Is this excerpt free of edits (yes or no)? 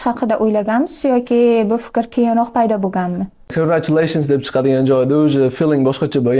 no